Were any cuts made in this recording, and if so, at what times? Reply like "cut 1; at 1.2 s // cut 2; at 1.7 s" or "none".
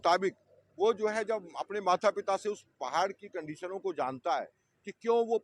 none